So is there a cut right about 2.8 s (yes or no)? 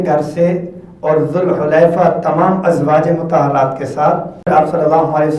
no